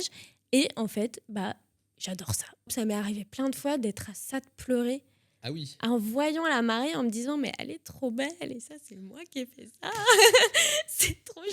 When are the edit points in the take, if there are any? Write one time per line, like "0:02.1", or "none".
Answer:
0:02.7